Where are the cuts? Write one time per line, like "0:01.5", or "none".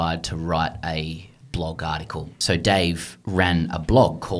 0:01.3
0:02.3